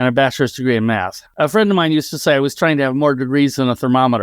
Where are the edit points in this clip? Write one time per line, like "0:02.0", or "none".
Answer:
0:01.2